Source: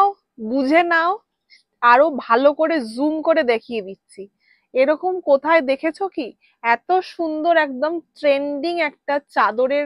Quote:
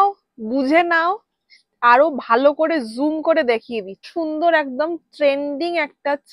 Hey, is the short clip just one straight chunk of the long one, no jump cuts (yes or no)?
no